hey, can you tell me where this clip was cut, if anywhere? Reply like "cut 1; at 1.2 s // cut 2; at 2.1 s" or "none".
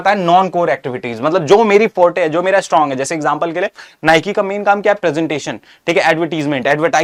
none